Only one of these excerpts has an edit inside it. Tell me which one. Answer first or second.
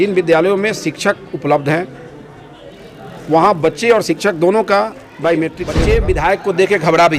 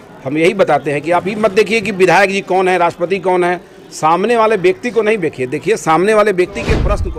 first